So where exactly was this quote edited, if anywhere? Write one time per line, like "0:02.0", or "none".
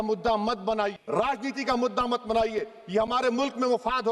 none